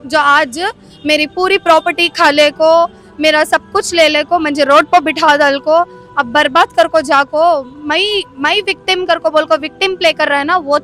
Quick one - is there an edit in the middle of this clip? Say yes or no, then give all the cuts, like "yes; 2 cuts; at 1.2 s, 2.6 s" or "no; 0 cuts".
no; 0 cuts